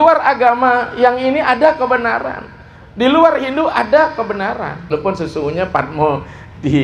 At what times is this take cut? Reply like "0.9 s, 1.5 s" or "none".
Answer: 4.9 s